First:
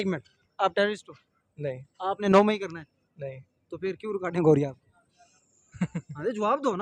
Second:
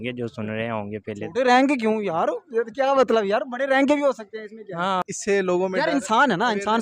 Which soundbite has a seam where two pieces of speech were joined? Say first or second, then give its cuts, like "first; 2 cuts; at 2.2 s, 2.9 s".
second; 1 cut; at 5.1 s